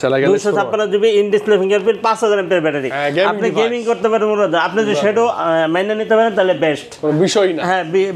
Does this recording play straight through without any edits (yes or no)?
yes